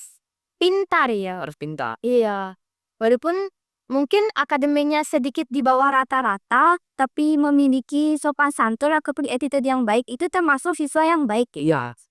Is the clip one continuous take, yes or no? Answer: yes